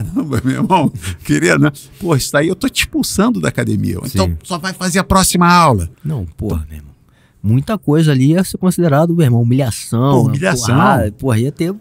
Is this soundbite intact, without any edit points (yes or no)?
no